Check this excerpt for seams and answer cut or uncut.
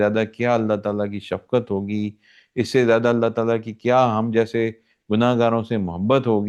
uncut